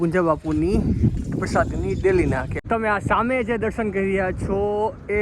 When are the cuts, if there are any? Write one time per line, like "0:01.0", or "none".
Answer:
0:02.5